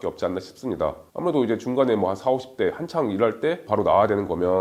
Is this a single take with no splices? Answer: yes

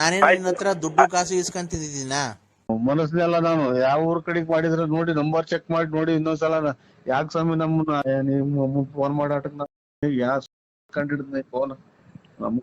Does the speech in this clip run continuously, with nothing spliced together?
no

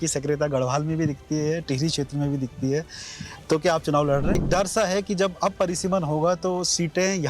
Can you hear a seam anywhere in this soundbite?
yes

